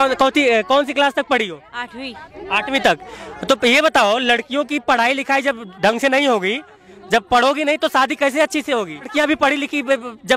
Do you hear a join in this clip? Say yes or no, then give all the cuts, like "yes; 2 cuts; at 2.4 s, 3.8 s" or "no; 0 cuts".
yes; 1 cut; at 9.1 s